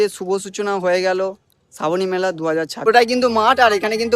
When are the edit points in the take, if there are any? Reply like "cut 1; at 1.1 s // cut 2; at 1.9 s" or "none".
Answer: cut 1; at 2.8 s